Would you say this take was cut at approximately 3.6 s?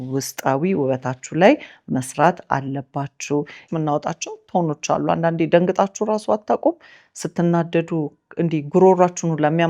yes; 1 cut; at 3.6 s

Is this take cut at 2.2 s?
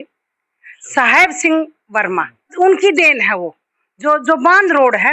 no; 0 cuts

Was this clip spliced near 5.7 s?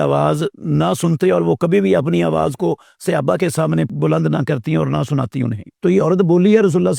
yes; 2 cuts; at 3.9 s, 5.7 s

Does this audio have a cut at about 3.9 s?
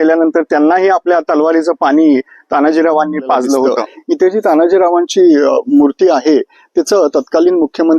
yes; 1 cut; at 3.9 s

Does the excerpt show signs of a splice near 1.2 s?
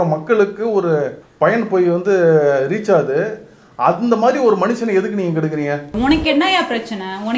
yes; 2 cuts; at 1.2 s, 5.9 s

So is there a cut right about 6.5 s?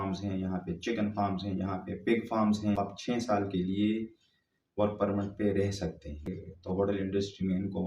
yes; 2 cuts; at 3.0 s, 6.5 s

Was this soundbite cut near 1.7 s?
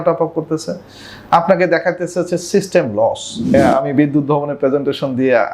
no; 1 cut; at 3.5 s

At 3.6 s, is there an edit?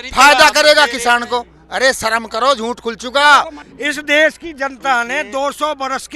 yes; 1 cut; at 3.6 s

